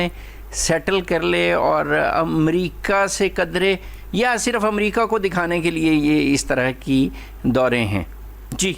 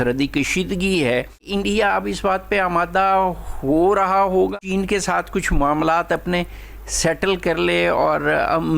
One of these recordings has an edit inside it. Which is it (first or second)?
second